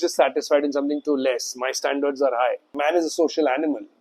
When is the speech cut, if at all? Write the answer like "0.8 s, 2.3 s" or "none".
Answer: 2.7 s